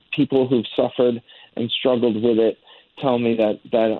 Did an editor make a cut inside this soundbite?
no; 0 cuts

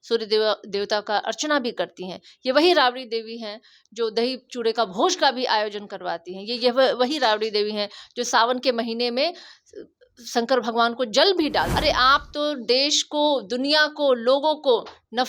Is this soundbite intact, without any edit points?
no; 1 cut; at 11.7 s

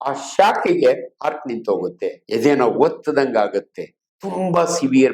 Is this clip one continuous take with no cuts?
no; 1 cut; at 2.2 s

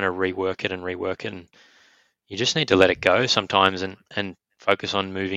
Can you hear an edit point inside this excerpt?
no; 0 cuts

